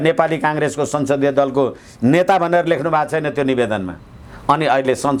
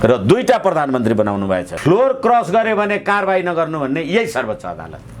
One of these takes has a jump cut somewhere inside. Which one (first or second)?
second